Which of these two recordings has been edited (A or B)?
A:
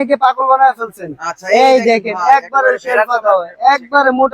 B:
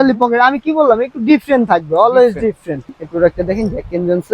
B